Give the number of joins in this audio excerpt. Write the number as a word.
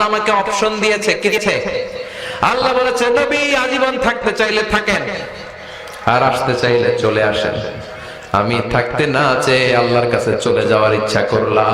one